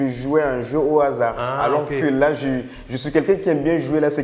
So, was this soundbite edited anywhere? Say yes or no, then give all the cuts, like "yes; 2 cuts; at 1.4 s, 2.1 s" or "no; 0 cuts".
no; 0 cuts